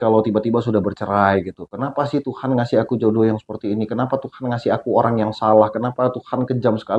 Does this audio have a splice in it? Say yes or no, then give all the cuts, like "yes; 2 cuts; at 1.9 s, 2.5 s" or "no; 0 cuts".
no; 0 cuts